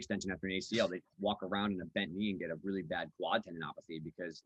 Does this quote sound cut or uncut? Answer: uncut